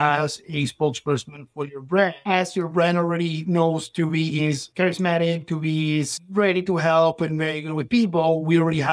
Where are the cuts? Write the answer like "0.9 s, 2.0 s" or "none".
4.7 s